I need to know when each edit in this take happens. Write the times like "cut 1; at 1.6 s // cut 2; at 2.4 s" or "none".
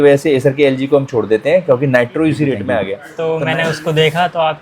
cut 1; at 2.9 s